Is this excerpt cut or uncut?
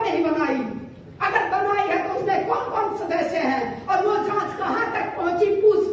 uncut